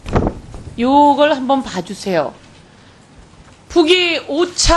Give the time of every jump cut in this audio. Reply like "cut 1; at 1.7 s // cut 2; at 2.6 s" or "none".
cut 1; at 2.7 s